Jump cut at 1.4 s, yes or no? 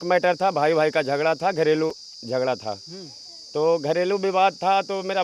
no